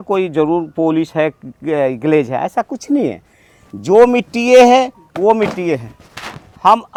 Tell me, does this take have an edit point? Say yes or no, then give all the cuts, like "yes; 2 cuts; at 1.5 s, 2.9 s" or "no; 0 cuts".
no; 0 cuts